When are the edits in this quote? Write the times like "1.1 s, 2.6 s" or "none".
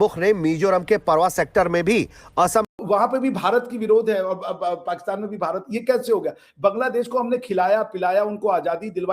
2.6 s